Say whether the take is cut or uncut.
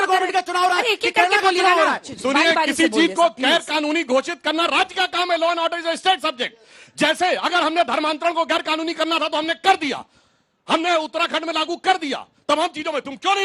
cut